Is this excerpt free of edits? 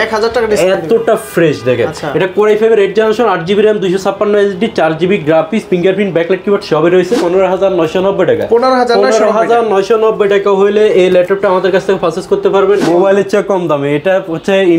no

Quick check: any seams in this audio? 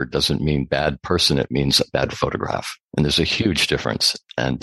no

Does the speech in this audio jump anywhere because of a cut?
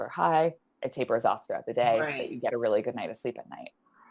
no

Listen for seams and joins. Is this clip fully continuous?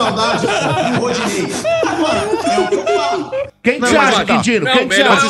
no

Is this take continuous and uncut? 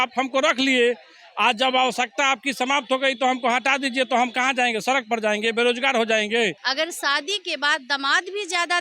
no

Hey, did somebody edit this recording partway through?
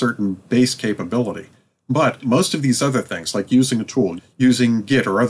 no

